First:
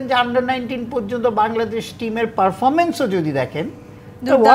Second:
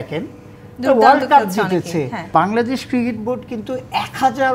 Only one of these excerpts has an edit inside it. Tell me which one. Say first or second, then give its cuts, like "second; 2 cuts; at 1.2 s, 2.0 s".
second; 1 cut; at 2.3 s